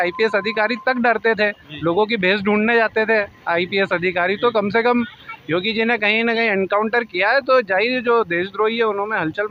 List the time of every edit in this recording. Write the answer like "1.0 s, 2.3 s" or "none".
none

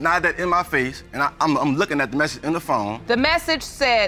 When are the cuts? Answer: 3.0 s

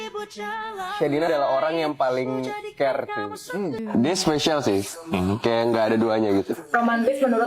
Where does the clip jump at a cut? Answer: 3.8 s

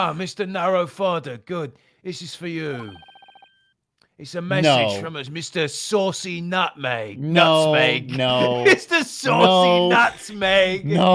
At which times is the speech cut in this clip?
none

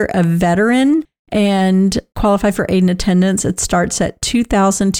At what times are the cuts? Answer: 1.2 s

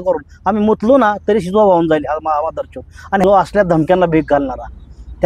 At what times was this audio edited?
3.2 s

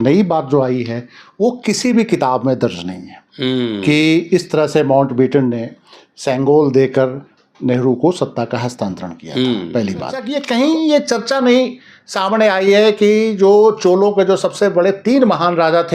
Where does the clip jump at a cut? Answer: 10.3 s

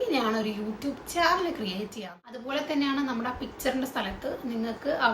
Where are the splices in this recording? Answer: 2.0 s

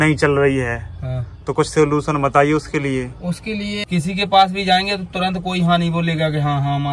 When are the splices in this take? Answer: 3.8 s

